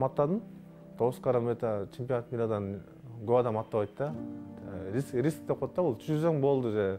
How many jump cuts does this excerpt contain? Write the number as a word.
zero